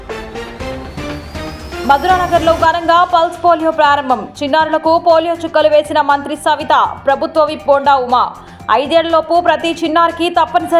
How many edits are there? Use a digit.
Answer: 1